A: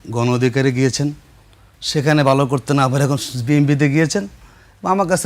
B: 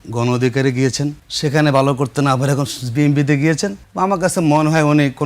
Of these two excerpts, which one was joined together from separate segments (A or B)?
B